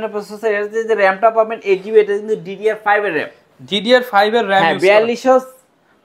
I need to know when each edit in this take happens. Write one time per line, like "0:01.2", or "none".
none